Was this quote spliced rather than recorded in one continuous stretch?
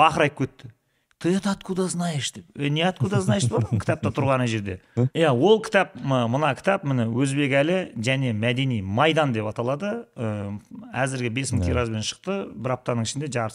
yes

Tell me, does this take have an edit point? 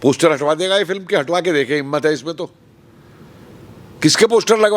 no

